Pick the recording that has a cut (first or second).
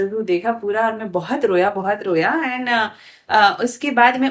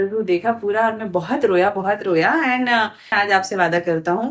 second